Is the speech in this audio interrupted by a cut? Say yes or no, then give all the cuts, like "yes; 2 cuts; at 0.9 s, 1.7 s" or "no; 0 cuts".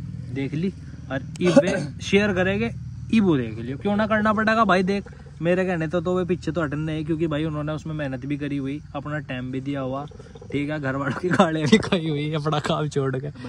no; 0 cuts